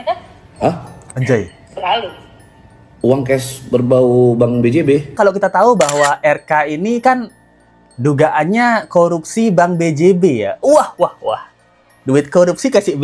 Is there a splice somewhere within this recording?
yes; 1 cut; at 5.2 s

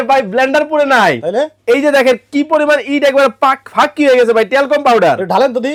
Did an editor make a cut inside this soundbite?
no; 0 cuts

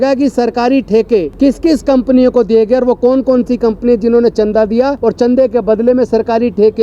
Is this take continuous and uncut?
no; 2 cuts; at 1.3 s, 5.0 s

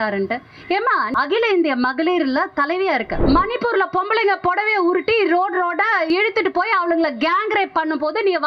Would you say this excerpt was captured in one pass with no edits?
no; 3 cuts; at 1.1 s, 3.1 s, 6.1 s

